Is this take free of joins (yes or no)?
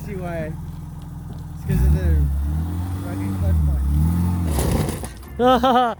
yes